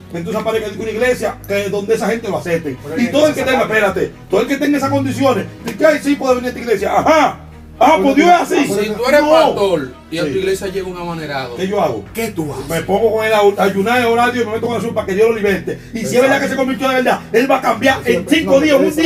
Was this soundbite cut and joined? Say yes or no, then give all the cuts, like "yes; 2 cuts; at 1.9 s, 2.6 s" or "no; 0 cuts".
no; 0 cuts